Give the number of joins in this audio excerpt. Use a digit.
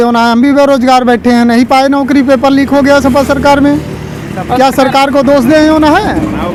0